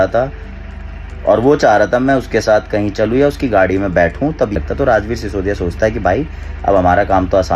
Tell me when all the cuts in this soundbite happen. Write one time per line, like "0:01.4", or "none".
0:04.5